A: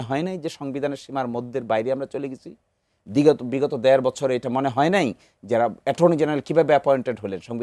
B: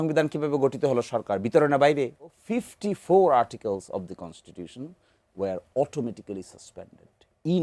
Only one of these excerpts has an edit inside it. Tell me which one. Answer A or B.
B